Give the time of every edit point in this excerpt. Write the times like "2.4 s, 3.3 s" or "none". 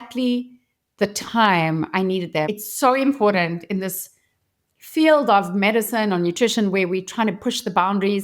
2.5 s